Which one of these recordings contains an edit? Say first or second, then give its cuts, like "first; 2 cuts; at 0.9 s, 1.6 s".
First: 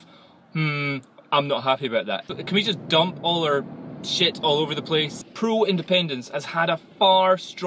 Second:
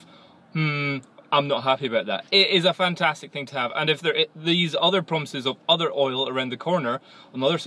first; 2 cuts; at 2.2 s, 5.2 s